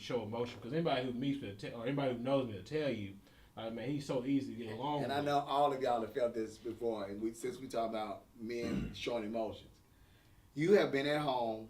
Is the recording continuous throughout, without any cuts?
no; 1 cut; at 5.0 s

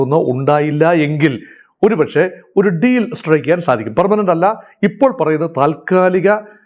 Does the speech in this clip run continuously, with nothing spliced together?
yes; 0 cuts

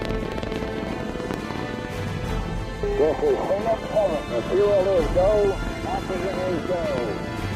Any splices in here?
yes; 1 cut; at 6.3 s

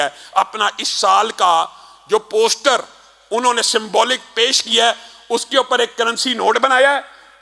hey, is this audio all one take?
yes; 0 cuts

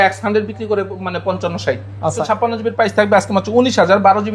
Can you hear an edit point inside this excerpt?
yes; 1 cut; at 2.2 s

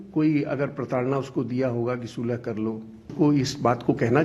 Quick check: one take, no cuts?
no; 1 cut; at 3.1 s

